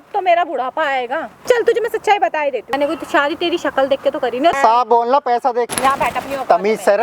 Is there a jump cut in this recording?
yes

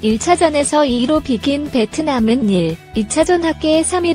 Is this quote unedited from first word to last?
yes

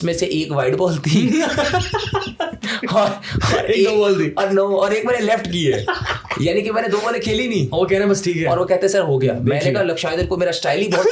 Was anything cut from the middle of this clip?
no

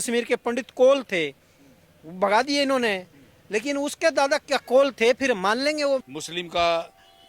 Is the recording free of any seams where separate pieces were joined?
no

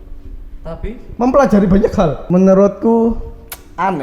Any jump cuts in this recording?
yes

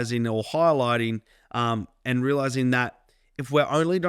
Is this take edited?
no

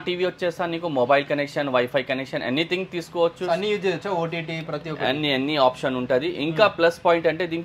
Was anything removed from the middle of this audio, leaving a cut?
no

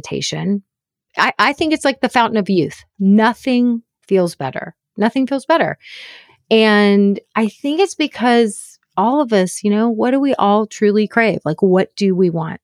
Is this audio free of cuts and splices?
no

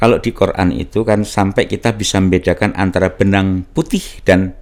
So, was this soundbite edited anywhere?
no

